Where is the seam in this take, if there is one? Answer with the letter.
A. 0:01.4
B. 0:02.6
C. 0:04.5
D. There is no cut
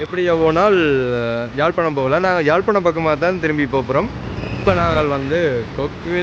C